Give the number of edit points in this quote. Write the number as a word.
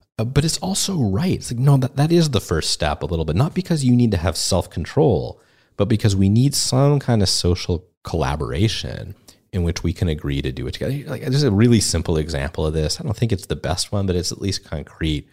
zero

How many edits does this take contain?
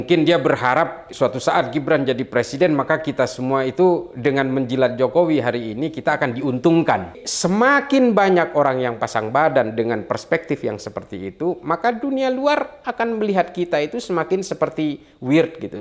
two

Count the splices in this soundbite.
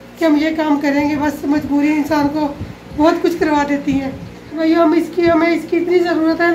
one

